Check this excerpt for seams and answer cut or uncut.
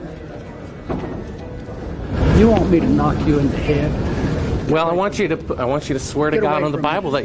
uncut